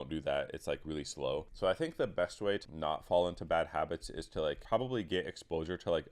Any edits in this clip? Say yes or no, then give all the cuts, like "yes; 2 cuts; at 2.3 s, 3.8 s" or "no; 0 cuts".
yes; 3 cuts; at 1.5 s, 2.6 s, 4.6 s